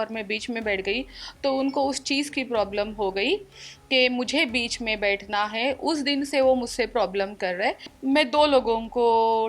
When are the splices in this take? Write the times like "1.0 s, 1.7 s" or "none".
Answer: 7.9 s